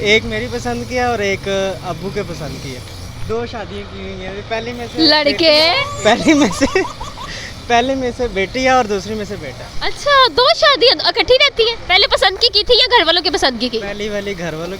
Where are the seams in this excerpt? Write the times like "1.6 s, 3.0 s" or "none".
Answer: none

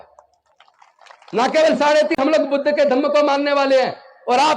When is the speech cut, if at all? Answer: 2.2 s

